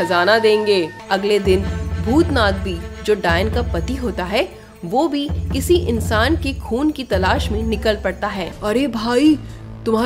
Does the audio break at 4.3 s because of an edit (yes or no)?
no